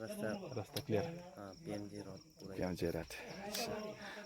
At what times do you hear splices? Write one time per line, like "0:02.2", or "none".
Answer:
none